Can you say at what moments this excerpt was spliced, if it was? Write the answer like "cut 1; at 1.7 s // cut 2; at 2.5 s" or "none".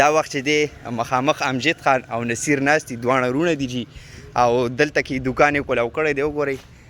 none